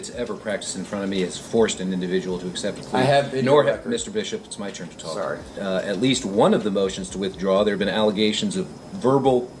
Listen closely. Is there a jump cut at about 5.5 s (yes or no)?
yes